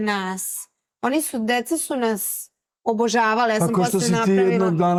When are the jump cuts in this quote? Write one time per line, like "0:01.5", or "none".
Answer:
none